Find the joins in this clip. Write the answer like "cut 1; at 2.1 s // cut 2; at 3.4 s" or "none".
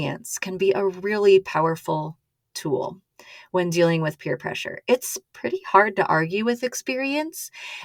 none